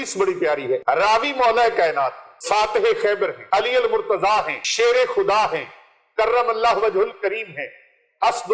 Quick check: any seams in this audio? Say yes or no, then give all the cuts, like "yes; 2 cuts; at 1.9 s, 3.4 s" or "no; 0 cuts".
yes; 4 cuts; at 0.8 s, 2.3 s, 3.4 s, 4.6 s